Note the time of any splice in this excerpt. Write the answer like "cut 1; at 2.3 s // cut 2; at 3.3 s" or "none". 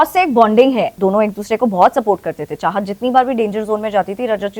cut 1; at 0.9 s